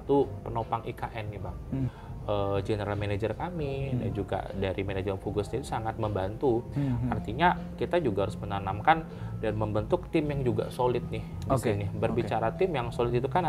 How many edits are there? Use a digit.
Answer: 1